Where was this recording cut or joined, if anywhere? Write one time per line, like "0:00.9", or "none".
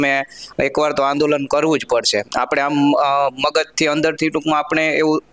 none